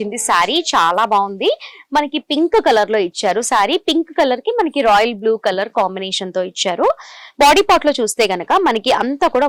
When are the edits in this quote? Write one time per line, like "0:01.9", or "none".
none